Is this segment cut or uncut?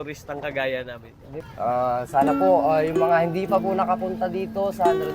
cut